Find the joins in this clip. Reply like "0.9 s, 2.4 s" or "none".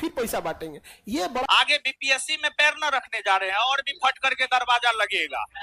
1.5 s